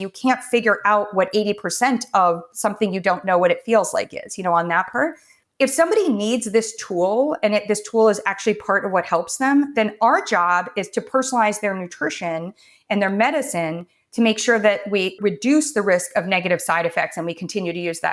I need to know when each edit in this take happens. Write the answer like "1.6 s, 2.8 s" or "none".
15.2 s